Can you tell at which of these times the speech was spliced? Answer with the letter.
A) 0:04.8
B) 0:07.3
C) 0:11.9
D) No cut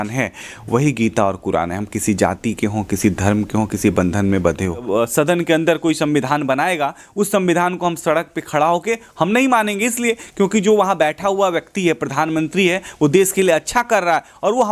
A